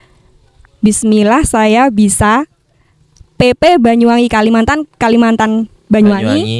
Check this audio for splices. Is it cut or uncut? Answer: uncut